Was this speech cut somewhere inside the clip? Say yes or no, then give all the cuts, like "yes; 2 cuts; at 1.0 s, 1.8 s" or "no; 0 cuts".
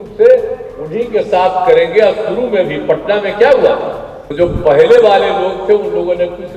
yes; 1 cut; at 4.2 s